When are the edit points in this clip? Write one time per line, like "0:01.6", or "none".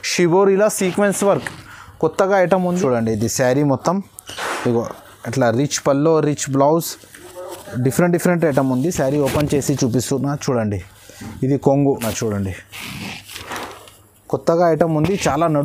0:02.7
0:12.0

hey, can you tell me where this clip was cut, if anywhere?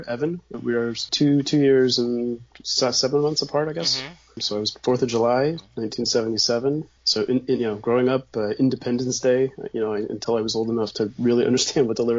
0:01.0
0:04.7
0:07.0

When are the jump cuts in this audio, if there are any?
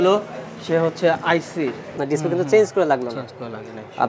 0:02.0

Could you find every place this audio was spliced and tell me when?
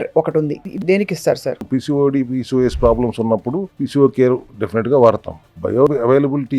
0:00.8
0:01.6
0:03.7
0:04.5
0:05.7

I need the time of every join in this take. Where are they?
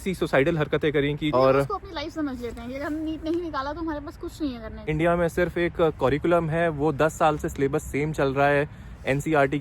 0:01.3
0:04.9

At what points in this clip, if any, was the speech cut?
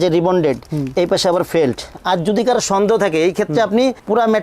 0:01.9

